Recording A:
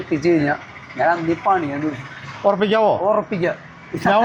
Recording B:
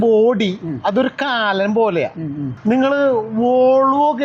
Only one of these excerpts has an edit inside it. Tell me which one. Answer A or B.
B